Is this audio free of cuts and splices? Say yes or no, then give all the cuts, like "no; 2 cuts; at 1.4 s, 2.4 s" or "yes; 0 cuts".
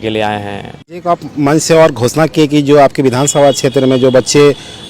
no; 1 cut; at 1.0 s